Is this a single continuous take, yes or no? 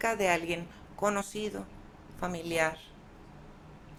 yes